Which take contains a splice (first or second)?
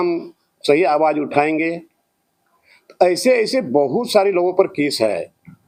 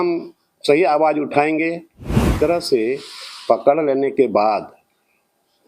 second